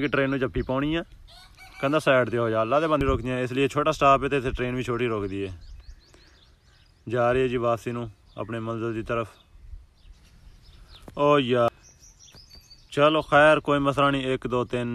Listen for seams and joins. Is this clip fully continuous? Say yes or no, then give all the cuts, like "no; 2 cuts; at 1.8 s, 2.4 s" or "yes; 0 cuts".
no; 2 cuts; at 3.0 s, 11.7 s